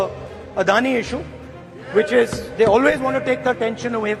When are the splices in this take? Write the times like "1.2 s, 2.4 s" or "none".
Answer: none